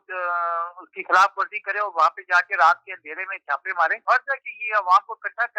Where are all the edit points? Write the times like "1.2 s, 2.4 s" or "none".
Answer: 4.0 s